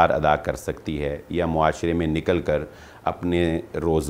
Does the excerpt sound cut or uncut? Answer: uncut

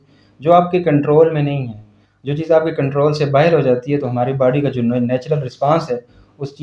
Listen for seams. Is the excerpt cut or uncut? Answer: uncut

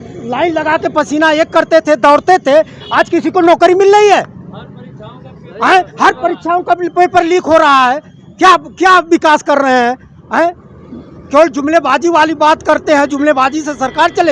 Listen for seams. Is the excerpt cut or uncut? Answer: uncut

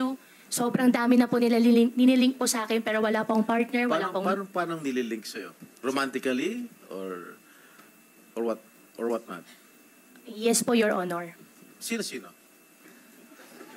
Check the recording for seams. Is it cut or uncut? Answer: uncut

